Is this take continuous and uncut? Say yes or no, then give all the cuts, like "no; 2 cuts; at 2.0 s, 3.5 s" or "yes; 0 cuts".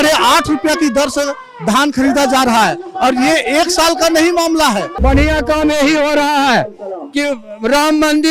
no; 1 cut; at 4.9 s